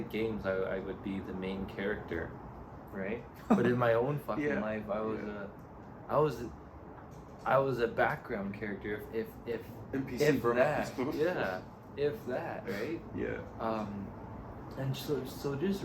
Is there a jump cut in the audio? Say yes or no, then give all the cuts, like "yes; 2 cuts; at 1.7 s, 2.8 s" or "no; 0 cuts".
no; 0 cuts